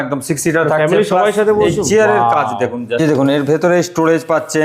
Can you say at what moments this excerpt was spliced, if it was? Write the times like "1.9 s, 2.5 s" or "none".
3.0 s